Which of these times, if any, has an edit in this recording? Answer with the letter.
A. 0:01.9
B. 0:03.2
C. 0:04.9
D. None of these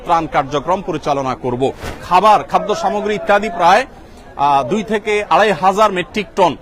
A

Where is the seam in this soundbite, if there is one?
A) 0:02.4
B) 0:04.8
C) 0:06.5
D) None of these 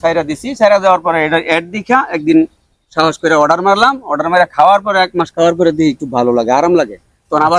D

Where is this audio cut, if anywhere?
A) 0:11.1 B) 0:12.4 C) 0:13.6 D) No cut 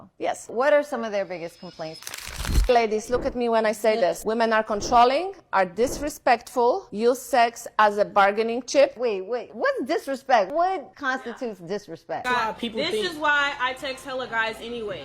B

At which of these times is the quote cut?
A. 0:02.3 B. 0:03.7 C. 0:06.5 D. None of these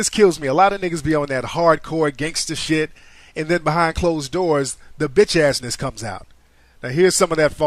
A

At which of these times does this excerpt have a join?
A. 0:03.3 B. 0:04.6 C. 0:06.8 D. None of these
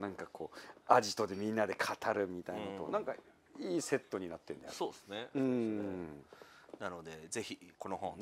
D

